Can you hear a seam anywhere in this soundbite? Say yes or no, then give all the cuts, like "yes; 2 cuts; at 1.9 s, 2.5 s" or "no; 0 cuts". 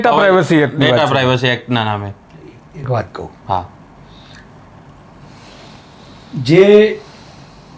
no; 0 cuts